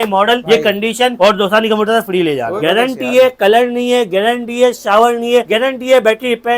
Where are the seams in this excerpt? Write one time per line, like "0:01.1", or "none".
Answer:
0:02.5
0:05.5